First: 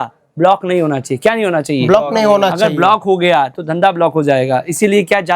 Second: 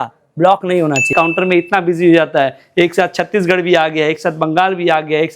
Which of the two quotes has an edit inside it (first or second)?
second